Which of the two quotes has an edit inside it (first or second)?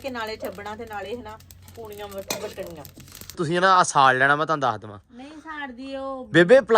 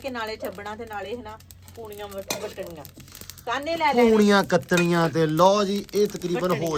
first